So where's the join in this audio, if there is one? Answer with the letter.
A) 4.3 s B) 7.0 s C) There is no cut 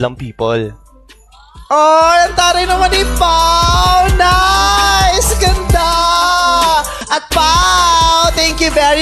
B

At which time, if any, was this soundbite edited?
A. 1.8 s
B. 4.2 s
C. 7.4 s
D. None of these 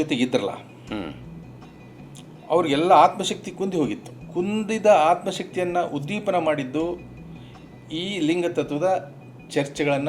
B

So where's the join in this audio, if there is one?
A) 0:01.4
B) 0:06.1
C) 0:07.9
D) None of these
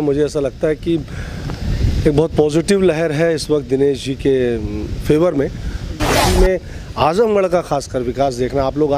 B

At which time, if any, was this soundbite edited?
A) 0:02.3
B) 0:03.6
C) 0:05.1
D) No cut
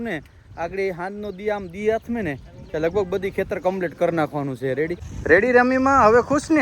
C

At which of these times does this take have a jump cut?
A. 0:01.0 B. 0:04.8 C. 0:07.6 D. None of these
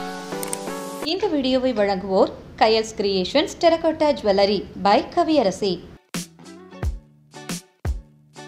A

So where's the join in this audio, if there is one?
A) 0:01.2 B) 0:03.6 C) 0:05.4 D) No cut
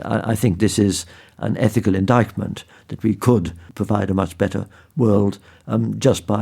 B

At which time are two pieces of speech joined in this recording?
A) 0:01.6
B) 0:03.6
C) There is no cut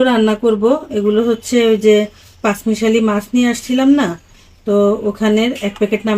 C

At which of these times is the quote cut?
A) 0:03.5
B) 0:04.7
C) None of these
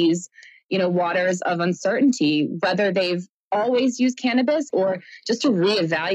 B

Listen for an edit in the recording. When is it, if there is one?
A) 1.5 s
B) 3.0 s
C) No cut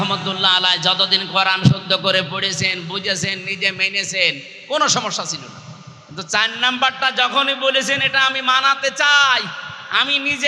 C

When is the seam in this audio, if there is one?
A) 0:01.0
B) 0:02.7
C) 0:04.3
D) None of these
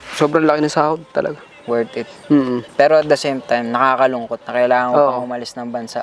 B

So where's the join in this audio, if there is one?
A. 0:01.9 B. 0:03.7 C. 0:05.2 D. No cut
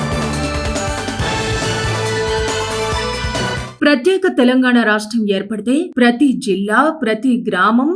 B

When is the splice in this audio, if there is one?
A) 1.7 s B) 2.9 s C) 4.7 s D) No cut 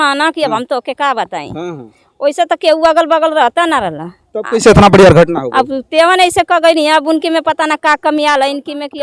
D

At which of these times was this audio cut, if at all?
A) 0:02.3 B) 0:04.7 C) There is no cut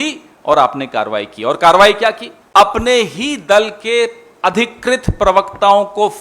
A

